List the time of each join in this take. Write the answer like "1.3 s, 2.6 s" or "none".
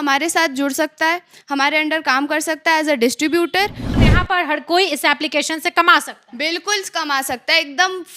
3.9 s

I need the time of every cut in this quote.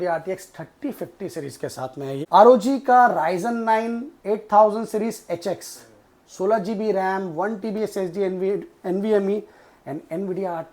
2.2 s

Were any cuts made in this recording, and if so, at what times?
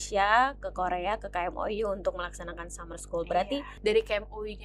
3.7 s

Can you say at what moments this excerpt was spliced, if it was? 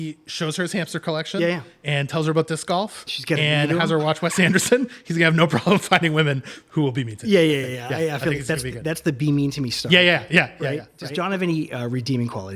11.0 s

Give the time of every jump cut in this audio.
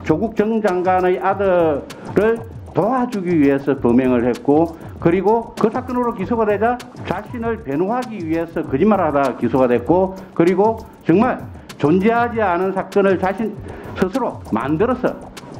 5.5 s, 6.9 s, 14.4 s

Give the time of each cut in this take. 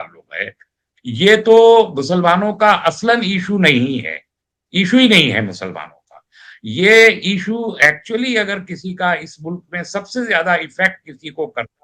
none

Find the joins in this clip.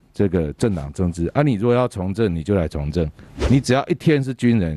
3.3 s

